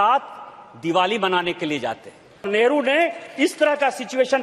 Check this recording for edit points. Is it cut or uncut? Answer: cut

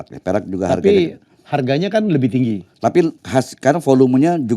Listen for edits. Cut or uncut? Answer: cut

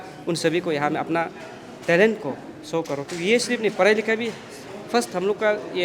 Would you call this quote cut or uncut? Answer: uncut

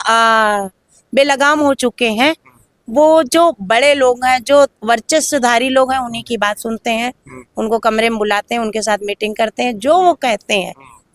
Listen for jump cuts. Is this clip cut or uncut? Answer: uncut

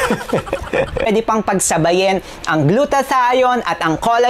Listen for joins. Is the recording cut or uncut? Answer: cut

